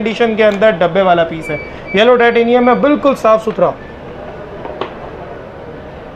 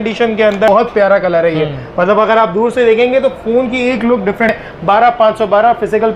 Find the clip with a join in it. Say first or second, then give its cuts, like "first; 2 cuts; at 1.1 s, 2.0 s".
second; 2 cuts; at 0.7 s, 4.5 s